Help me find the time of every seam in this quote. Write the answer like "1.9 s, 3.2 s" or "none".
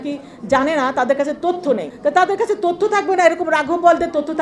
1.9 s